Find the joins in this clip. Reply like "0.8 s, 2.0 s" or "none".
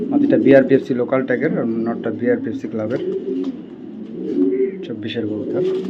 none